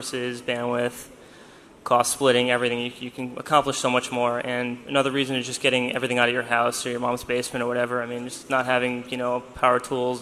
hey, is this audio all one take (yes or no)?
no